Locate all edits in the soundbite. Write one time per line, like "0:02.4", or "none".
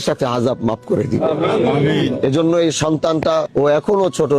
0:03.5